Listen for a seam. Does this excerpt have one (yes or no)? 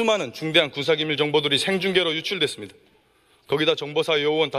no